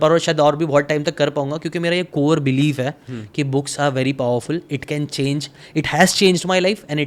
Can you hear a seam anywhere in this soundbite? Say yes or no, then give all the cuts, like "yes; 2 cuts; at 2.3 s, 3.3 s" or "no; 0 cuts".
no; 0 cuts